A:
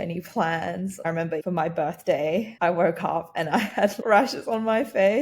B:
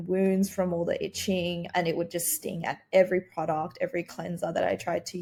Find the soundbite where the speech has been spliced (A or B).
A